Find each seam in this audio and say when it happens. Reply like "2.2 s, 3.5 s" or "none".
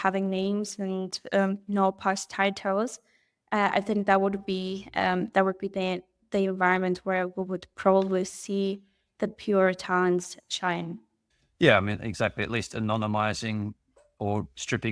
none